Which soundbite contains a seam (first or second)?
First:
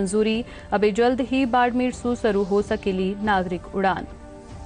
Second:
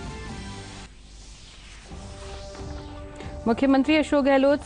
second